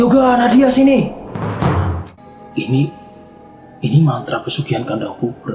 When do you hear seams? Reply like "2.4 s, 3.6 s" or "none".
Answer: 2.0 s